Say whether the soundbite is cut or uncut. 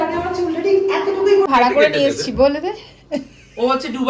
cut